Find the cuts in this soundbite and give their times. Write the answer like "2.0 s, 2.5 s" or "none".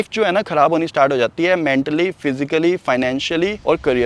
none